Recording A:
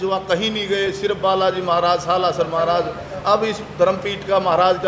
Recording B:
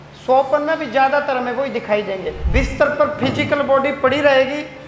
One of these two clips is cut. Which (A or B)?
B